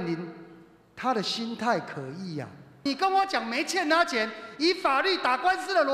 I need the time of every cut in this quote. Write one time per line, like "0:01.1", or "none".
0:02.7